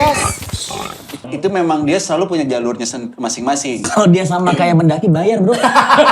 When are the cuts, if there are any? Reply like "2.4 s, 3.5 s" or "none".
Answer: 1.3 s, 3.8 s